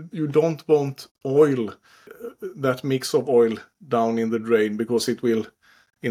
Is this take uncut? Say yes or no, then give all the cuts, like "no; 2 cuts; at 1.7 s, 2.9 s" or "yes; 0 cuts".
no; 1 cut; at 2.2 s